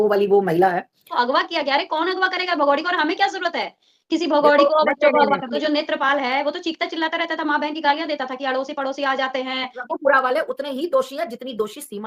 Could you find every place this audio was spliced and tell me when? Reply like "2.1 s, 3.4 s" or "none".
1.0 s, 5.5 s, 9.9 s